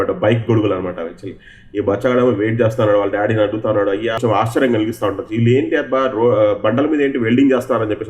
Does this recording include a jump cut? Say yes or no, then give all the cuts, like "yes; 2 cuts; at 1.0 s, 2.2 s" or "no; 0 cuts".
yes; 1 cut; at 4.2 s